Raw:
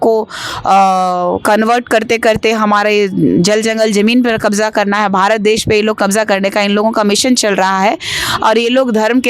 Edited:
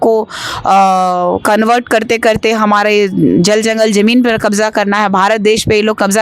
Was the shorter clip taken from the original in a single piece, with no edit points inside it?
yes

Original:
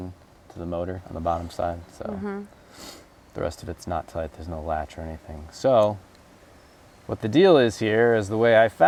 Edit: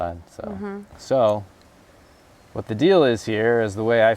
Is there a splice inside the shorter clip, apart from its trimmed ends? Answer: yes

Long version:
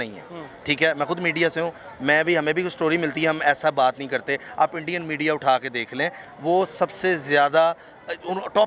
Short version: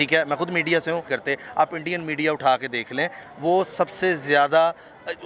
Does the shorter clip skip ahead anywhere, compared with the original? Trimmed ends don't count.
yes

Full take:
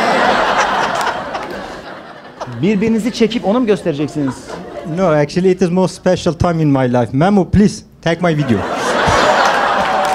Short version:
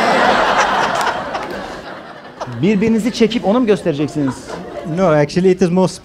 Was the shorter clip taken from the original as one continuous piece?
yes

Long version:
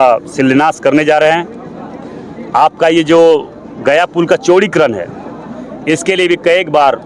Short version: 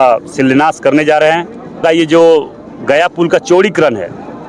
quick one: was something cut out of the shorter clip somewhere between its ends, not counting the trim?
yes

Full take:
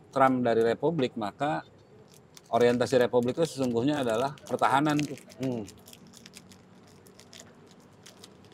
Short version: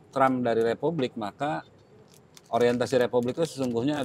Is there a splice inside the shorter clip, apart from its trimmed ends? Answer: no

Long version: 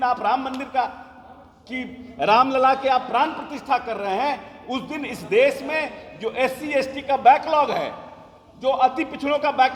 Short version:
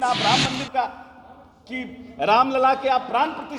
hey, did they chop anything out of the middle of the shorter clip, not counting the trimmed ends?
no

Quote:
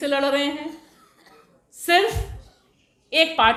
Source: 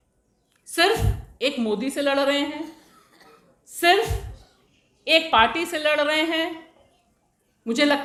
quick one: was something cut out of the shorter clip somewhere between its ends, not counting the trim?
no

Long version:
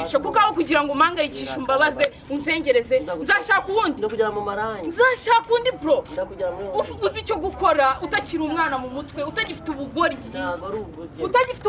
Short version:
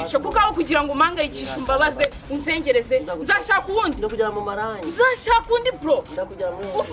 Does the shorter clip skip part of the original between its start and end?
no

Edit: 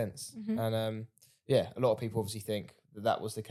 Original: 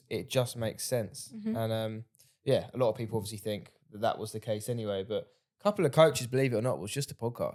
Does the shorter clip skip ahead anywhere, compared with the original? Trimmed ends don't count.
no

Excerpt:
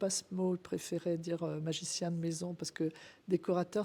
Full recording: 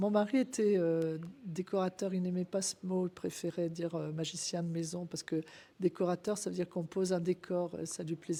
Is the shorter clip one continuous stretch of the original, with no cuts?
yes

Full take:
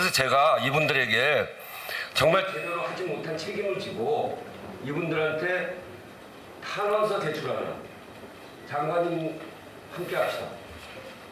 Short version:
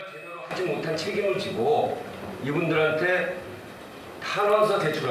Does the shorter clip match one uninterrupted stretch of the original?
yes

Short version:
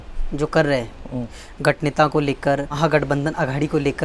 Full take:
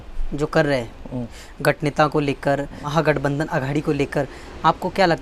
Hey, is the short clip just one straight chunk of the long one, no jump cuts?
no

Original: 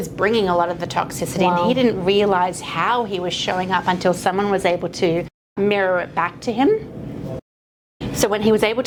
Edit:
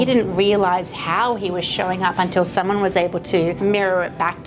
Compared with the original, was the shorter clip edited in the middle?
yes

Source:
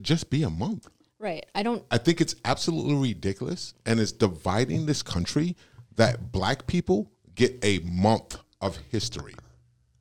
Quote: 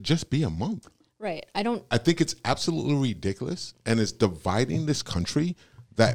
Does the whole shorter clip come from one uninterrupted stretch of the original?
yes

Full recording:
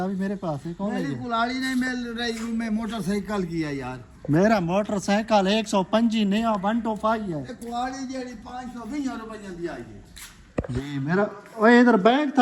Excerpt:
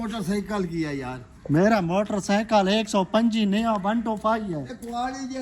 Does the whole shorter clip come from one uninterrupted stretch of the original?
yes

